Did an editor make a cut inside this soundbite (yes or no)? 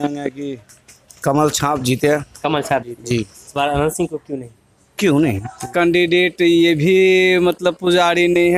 yes